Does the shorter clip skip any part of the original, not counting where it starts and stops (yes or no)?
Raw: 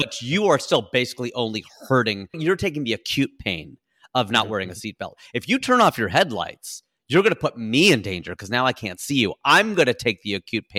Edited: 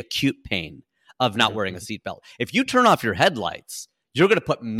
no